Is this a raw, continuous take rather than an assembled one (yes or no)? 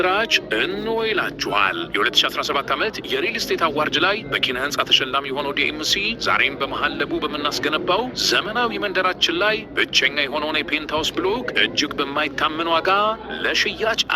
yes